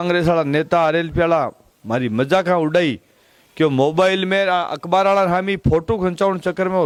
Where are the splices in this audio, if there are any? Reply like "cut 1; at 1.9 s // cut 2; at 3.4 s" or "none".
none